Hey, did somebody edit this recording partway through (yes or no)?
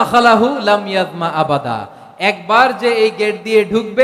no